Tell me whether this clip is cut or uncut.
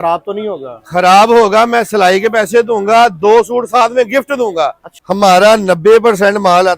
cut